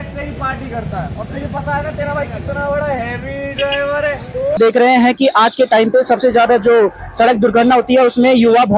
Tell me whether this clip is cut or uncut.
cut